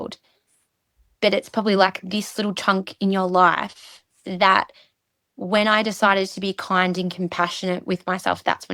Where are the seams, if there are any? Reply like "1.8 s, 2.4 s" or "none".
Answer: none